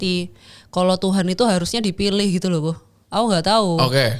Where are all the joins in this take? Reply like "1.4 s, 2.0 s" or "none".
none